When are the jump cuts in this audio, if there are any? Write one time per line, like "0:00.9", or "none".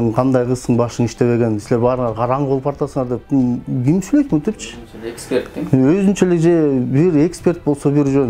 none